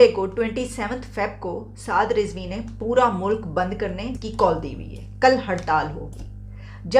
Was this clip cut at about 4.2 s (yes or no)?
yes